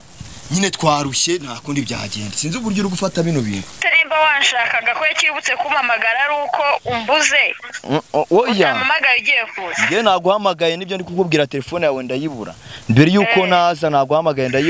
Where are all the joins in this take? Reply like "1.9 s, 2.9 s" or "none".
3.8 s